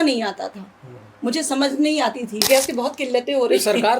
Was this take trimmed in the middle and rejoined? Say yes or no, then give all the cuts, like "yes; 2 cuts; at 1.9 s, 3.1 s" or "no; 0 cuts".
yes; 1 cut; at 2.4 s